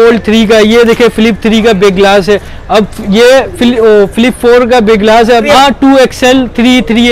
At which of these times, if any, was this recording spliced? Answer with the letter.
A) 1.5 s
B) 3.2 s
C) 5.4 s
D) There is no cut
C